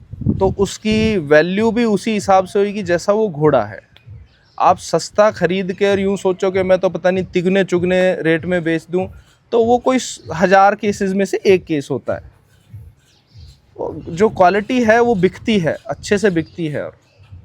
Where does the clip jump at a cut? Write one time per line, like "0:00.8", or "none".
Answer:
none